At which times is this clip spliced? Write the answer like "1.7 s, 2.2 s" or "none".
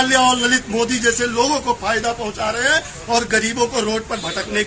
none